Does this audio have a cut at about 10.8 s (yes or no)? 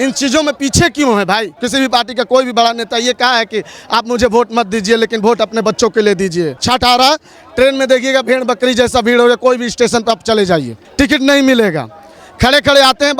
yes